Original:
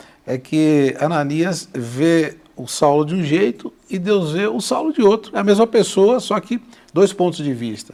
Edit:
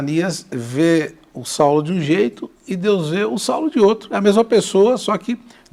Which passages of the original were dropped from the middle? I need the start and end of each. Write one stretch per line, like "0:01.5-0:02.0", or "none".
none